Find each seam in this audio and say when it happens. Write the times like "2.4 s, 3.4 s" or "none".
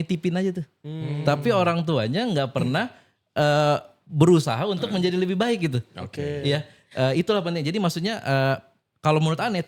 none

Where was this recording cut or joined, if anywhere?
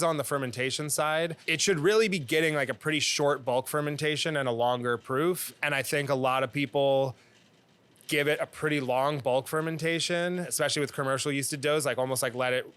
1.4 s, 5.6 s, 10.5 s

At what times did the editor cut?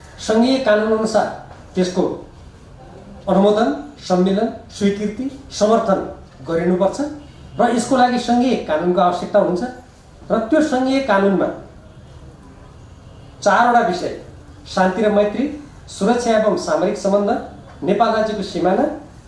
none

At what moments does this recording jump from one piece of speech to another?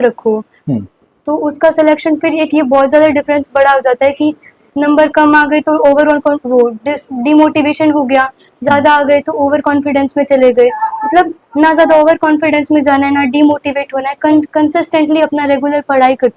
none

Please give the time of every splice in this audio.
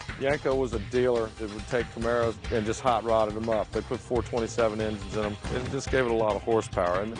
1.4 s, 5.5 s

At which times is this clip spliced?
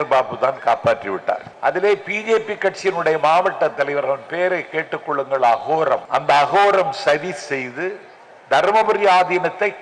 1.5 s, 6.0 s

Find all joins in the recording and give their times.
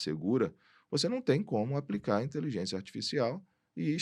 none

